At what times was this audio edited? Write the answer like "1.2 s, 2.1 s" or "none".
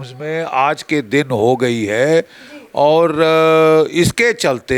none